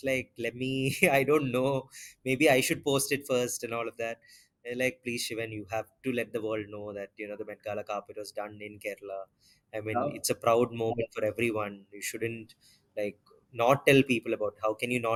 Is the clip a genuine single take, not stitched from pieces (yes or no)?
yes